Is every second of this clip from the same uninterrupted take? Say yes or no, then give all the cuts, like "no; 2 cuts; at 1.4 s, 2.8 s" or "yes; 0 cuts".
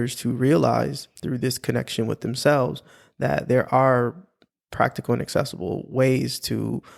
yes; 0 cuts